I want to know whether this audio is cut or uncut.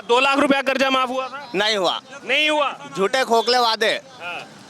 uncut